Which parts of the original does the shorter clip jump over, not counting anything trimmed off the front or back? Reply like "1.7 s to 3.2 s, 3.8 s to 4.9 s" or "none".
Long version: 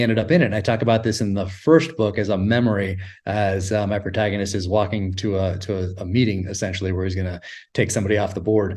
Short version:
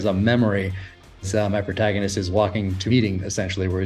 3.4 s to 3.5 s, 5.2 s to 6.0 s